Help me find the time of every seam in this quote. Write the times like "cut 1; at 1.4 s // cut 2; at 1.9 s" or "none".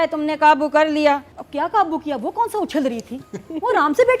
cut 1; at 1.4 s